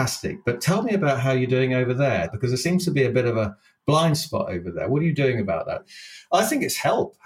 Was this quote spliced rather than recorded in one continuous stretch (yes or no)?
yes